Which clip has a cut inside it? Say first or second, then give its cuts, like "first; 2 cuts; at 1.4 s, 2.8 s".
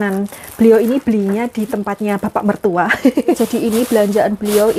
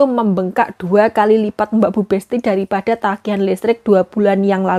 first; 1 cut; at 3.4 s